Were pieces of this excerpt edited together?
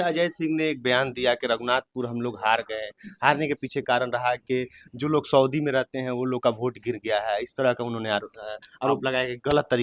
no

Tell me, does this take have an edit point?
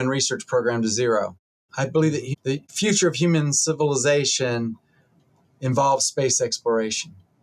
yes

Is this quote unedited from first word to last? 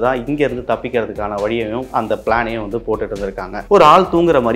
no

